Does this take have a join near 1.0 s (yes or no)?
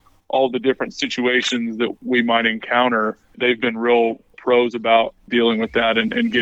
no